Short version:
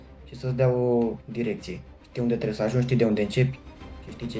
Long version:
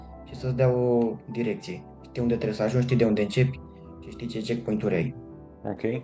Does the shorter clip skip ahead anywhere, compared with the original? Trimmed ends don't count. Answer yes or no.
no